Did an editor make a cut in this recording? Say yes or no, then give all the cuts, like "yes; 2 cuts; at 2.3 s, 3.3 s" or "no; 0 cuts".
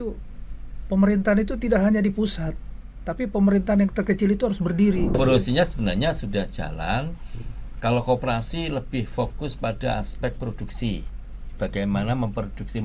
yes; 1 cut; at 5.2 s